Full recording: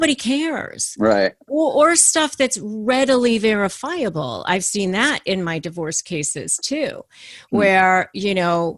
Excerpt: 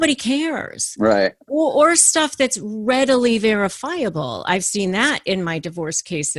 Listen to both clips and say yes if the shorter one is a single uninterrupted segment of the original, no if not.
yes